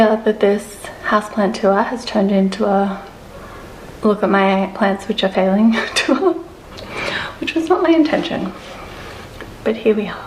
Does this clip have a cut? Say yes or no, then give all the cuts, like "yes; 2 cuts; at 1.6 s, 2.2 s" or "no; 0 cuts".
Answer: no; 0 cuts